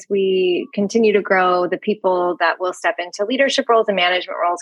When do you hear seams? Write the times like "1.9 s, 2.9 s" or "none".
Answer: none